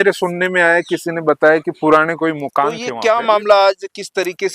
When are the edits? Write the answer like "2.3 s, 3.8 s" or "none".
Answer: 2.8 s